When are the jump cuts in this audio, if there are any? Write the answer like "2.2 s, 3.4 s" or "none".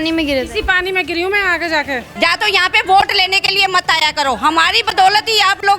2.1 s